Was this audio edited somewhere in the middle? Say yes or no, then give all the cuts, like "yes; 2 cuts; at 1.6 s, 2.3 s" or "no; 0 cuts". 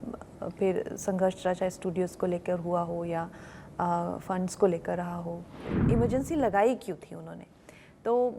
yes; 1 cut; at 5.7 s